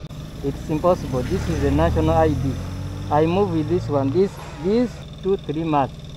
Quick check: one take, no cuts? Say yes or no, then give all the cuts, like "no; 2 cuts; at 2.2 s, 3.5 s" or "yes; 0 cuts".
no; 1 cut; at 5.1 s